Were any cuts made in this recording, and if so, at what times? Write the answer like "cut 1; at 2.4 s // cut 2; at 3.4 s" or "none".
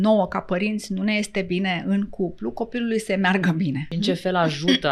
cut 1; at 3.9 s